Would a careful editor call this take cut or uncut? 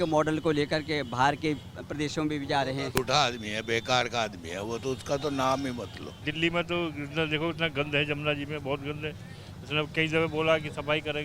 cut